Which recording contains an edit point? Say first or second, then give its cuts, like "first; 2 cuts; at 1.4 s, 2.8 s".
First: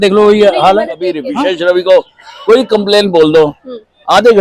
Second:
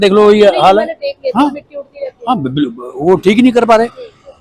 first; 1 cut; at 1.3 s